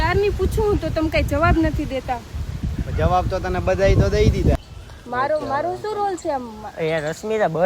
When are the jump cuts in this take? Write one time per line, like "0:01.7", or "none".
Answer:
0:04.5